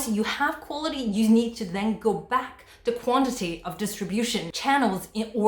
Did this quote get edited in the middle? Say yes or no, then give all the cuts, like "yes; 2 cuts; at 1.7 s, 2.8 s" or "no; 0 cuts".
yes; 1 cut; at 4.5 s